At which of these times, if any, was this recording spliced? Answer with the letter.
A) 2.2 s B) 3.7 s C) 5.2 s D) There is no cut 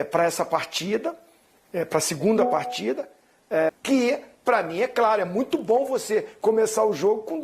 B